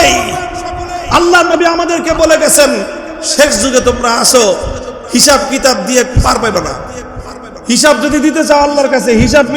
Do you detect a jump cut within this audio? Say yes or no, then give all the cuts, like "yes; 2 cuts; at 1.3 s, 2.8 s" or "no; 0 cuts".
yes; 1 cut; at 0.9 s